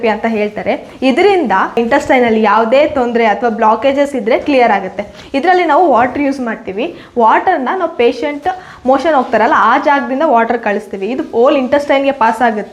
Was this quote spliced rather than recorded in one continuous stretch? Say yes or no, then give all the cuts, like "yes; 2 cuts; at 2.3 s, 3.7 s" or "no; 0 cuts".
no; 0 cuts